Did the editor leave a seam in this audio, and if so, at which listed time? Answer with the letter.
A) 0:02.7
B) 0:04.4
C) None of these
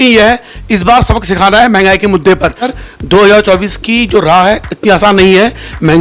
A